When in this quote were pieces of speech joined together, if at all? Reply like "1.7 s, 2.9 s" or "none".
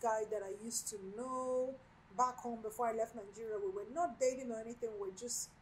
none